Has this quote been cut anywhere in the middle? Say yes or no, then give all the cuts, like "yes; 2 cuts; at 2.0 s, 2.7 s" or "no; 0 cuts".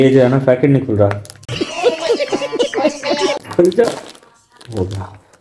no; 0 cuts